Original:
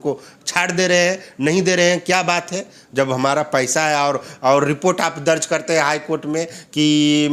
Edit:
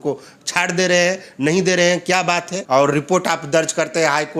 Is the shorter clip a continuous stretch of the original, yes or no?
no